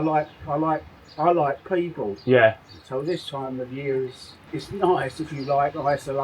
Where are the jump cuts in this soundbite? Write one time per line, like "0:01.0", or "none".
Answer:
none